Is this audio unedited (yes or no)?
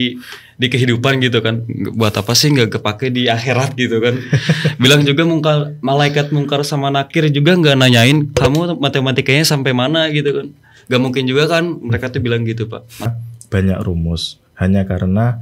no